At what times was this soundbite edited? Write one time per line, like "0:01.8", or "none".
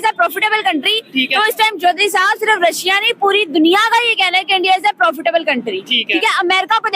none